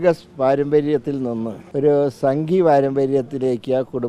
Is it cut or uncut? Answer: cut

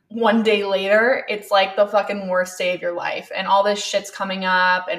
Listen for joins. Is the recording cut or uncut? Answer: uncut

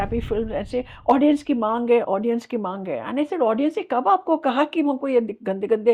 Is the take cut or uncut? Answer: uncut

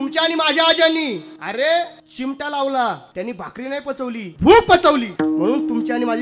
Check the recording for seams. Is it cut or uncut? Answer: cut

